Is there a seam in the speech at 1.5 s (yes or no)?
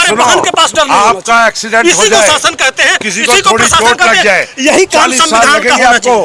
no